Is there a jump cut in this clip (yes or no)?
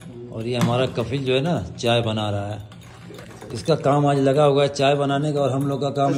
no